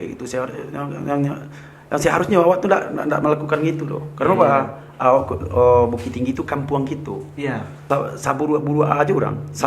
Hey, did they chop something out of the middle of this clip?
yes; 1 cut; at 7.8 s

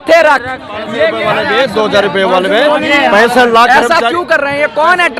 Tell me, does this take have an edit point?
yes; 1 cut; at 1.2 s

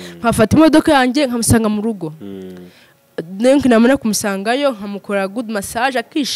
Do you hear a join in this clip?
no; 0 cuts

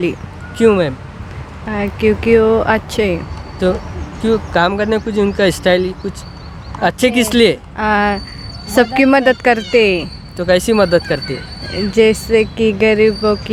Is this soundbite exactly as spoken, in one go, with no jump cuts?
yes; 0 cuts

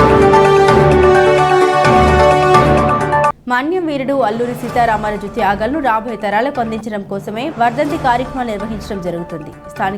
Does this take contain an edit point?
yes; 1 cut; at 1.3 s

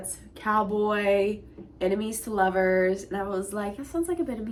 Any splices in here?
no; 0 cuts

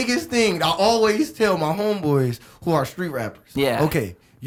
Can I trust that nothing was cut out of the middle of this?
yes; 0 cuts

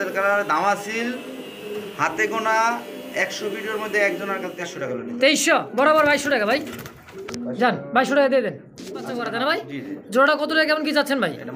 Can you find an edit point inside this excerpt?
yes; 2 cuts; at 4.8 s, 9.3 s

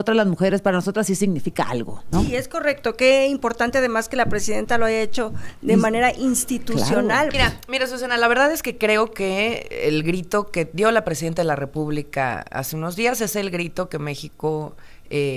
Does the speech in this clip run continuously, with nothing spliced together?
no; 2 cuts; at 2.0 s, 7.3 s

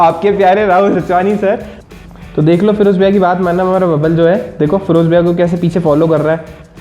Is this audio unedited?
no; 1 cut; at 1.7 s

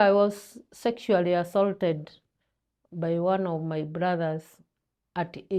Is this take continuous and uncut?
yes; 0 cuts

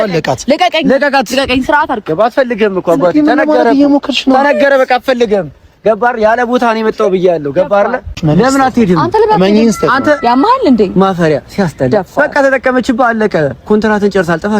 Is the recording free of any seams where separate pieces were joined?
no; 1 cut; at 8.1 s

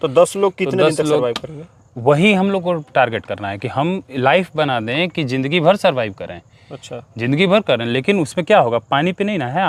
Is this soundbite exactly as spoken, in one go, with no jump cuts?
yes; 0 cuts

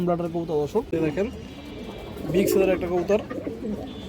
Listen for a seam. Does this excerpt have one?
yes; 1 cut; at 1.1 s

